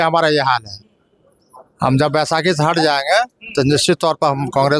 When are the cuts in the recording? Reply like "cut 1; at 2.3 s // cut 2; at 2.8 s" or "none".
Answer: none